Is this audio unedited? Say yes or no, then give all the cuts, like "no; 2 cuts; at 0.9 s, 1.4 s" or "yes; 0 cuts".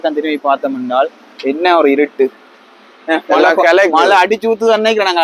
yes; 0 cuts